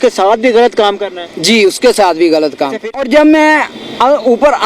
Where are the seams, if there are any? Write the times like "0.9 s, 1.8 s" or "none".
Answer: 2.8 s